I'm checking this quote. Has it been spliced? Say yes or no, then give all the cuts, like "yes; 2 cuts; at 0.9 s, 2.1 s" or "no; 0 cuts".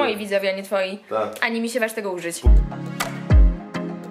yes; 1 cut; at 2.4 s